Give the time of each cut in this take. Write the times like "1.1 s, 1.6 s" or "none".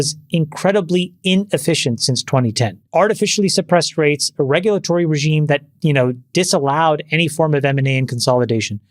2.8 s